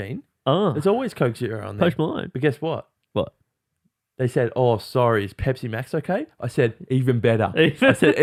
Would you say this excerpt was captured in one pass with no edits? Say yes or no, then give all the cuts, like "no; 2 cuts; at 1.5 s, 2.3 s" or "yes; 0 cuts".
yes; 0 cuts